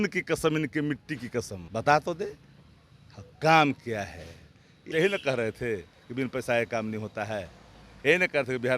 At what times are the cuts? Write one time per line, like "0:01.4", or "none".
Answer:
0:01.6
0:04.9